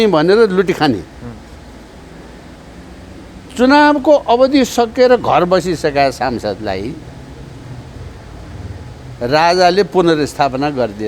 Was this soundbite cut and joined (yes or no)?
no